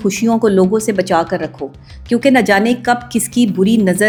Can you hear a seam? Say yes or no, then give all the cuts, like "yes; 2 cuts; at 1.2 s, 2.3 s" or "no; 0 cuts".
no; 0 cuts